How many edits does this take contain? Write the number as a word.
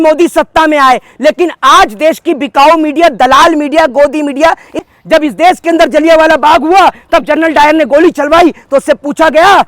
one